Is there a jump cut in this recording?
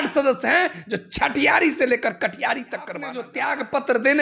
yes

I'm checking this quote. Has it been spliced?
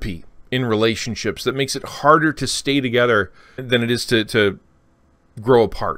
yes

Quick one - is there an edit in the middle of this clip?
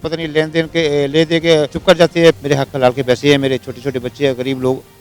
yes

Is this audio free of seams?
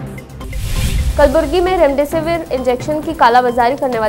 no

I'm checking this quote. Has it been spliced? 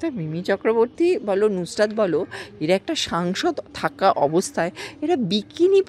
no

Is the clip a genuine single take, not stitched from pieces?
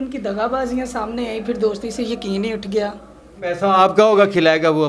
no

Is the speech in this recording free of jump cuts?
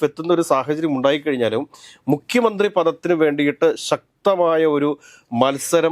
yes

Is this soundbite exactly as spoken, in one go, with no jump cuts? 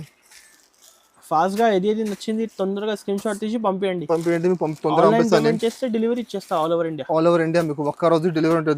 yes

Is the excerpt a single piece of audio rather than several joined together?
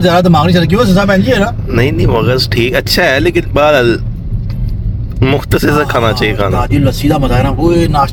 yes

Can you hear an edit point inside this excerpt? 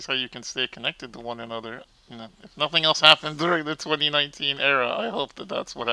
no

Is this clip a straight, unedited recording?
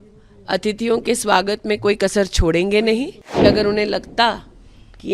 no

